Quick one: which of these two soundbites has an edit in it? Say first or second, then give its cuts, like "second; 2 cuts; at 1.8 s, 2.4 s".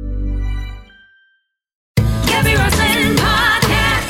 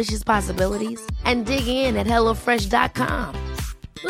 first; 1 cut; at 2.0 s